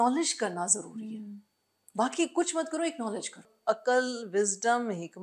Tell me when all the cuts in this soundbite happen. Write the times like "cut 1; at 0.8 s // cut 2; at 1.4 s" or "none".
cut 1; at 3.5 s